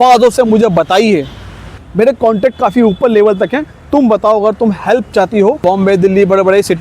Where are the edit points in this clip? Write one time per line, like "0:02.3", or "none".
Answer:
0:01.8
0:05.6